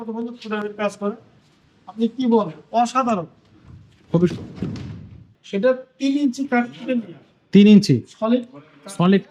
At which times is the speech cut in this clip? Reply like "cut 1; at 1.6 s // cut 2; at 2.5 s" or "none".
cut 1; at 5.3 s